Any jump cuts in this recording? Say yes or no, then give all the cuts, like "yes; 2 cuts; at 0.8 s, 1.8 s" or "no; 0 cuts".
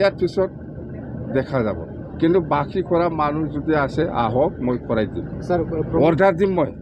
no; 0 cuts